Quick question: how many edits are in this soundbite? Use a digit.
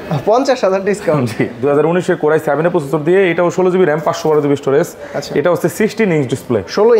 1